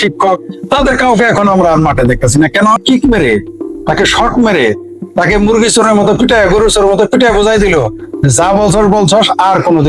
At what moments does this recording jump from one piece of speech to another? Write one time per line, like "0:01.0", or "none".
0:02.8